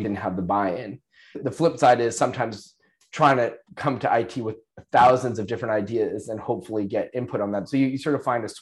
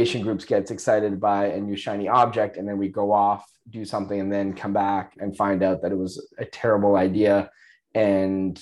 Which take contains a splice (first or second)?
first